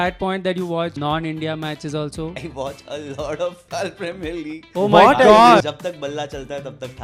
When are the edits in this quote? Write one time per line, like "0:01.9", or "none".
0:01.0
0:02.4
0:03.6
0:05.6

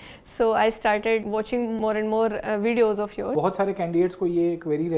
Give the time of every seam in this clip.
0:01.4
0:03.3

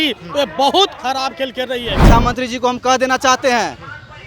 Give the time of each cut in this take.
0:02.0

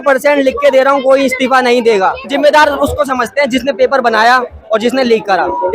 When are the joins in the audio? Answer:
0:02.3

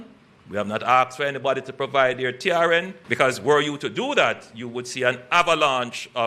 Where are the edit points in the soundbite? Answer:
0:03.0

